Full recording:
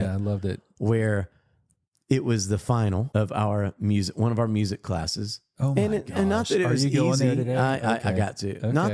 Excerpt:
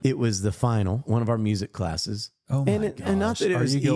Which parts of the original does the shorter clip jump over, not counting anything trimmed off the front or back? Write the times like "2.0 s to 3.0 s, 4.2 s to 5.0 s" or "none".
3.1 s to 4.1 s